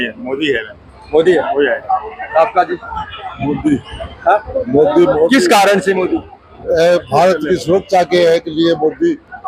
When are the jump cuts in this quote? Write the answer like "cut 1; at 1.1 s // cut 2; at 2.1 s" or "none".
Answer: none